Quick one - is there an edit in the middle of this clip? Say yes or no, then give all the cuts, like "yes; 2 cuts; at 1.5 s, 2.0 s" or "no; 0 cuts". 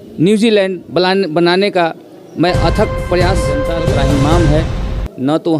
yes; 1 cut; at 3.7 s